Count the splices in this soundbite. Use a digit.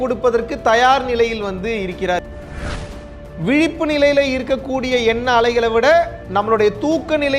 2